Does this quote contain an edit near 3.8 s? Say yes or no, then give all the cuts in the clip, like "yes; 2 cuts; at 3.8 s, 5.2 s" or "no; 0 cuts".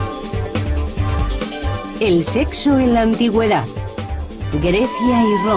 yes; 1 cut; at 3.8 s